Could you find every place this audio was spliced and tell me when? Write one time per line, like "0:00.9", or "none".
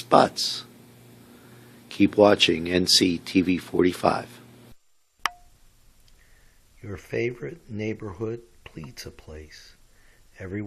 0:04.7